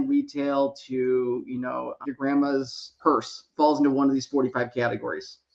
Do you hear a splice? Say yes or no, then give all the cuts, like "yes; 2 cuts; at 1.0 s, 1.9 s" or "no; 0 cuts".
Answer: yes; 1 cut; at 2.8 s